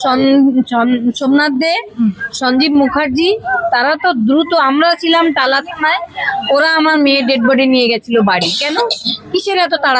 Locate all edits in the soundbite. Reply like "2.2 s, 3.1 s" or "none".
none